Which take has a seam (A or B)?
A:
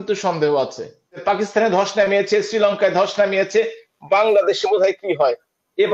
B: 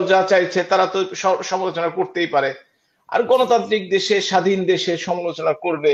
A